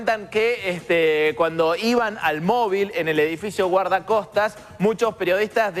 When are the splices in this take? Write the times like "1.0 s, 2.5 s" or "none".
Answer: none

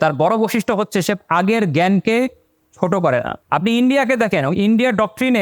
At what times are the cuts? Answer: 3.4 s

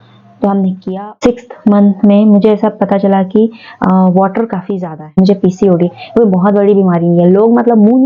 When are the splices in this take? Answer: 0.8 s, 5.1 s

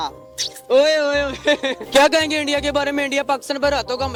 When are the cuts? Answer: none

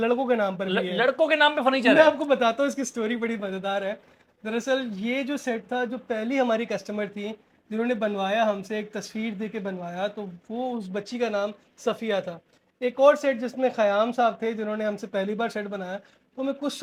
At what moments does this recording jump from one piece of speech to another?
none

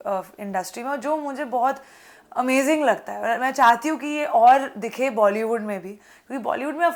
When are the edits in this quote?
none

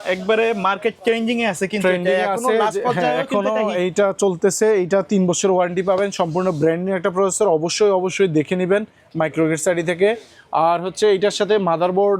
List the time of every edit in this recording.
none

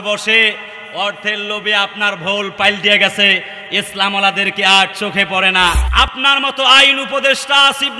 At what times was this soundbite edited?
5.8 s

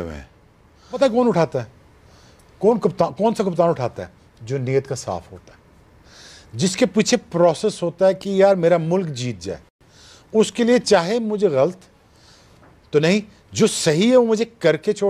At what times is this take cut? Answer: 0.9 s

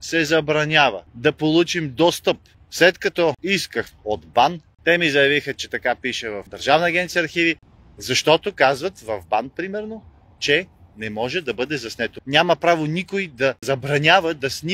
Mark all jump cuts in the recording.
2.5 s, 7.6 s, 12.1 s

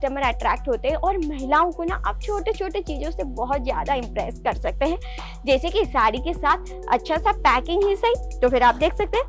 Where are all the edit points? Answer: none

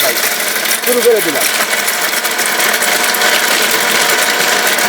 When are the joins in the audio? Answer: none

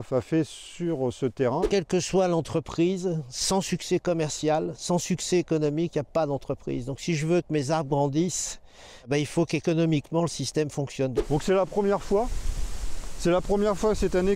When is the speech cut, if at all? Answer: 1.7 s, 11.2 s

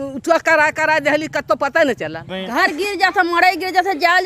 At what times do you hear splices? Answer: 2.3 s

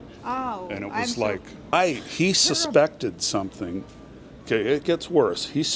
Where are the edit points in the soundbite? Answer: 1.7 s

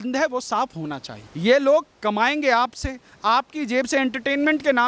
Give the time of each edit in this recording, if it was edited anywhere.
1.2 s

